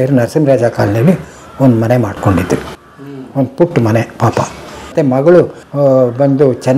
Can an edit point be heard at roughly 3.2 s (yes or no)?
no